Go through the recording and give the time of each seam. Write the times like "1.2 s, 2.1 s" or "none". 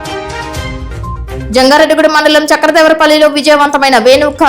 1.2 s